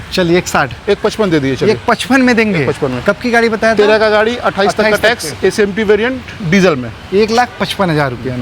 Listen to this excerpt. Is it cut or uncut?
uncut